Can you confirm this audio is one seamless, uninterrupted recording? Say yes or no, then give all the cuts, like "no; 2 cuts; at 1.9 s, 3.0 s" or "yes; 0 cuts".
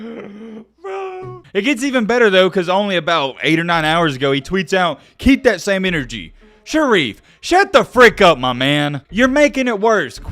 no; 1 cut; at 1.3 s